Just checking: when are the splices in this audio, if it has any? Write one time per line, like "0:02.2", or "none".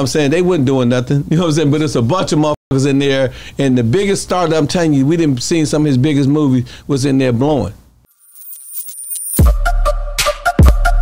0:08.0